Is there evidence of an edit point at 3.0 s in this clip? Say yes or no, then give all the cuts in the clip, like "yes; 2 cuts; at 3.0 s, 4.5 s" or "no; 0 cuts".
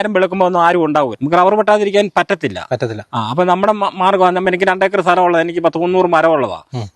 no; 1 cut; at 1.2 s